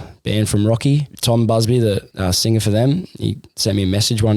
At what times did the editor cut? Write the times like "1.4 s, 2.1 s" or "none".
1.1 s, 2.1 s